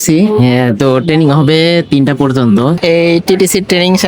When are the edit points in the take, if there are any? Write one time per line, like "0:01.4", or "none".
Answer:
0:02.8

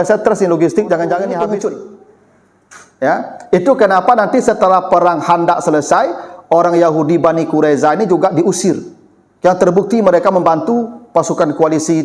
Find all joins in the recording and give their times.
0:01.3

